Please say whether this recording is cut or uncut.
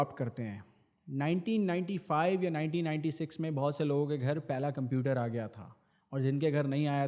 uncut